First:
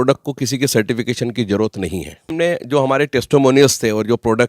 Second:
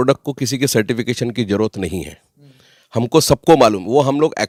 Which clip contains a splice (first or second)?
first